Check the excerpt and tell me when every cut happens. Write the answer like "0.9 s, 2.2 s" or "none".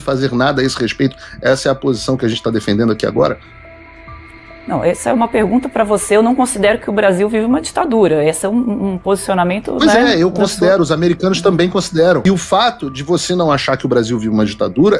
12.2 s